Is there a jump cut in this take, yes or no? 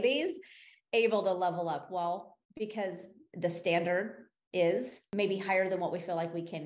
yes